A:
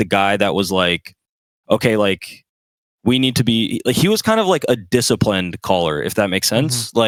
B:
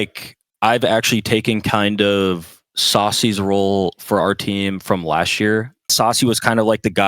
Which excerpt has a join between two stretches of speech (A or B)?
B